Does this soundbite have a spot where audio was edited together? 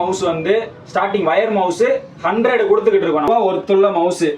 yes; 1 cut; at 3.3 s

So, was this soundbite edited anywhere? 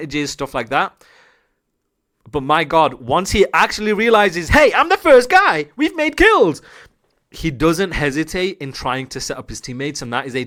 no; 0 cuts

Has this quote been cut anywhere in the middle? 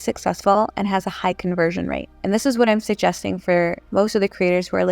yes; 2 cuts; at 2.1 s, 3.8 s

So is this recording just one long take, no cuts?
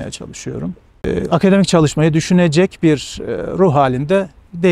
no; 1 cut; at 1.0 s

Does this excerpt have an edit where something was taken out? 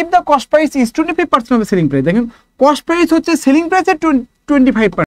no; 0 cuts

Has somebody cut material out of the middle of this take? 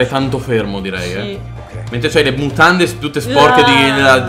no; 0 cuts

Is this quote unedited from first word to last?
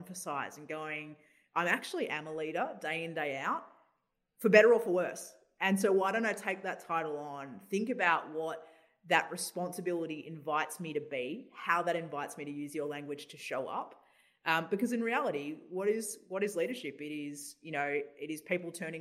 yes; 0 cuts

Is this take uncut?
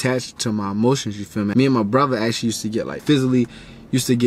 no; 2 cuts; at 1.5 s, 3.0 s

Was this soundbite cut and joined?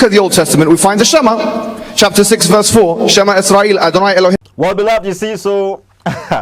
no; 0 cuts

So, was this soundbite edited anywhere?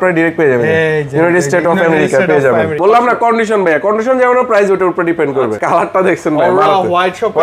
yes; 2 cuts; at 2.8 s, 5.6 s

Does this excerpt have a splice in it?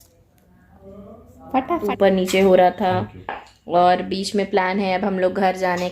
yes; 1 cut; at 1.8 s

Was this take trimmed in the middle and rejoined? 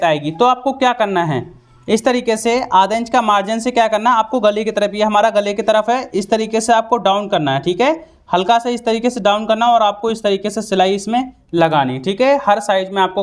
no; 0 cuts

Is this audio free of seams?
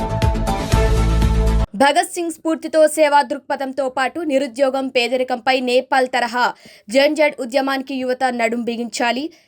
no; 1 cut; at 1.6 s

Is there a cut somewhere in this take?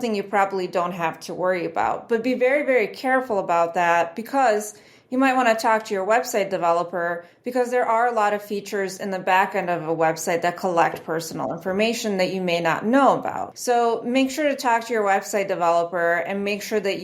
yes; 1 cut; at 13.5 s

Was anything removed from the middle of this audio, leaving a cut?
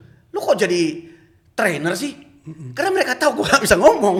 no; 0 cuts

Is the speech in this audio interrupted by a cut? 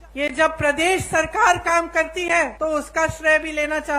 yes; 1 cut; at 2.5 s

